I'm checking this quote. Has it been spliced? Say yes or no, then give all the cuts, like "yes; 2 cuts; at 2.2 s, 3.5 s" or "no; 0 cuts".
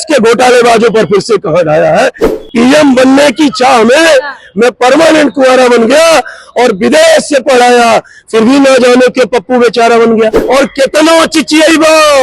yes; 2 cuts; at 2.3 s, 10.4 s